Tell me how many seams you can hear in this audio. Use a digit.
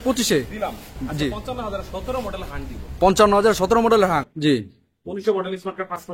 2